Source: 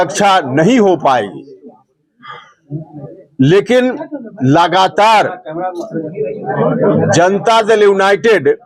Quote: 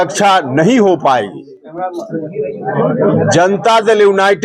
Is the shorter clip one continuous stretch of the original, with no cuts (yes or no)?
no